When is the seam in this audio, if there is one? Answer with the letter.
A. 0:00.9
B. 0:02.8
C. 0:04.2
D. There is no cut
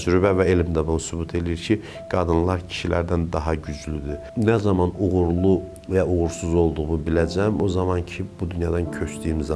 C